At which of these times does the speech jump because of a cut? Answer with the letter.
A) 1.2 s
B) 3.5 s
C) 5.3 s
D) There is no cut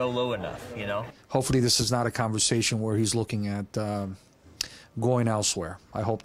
A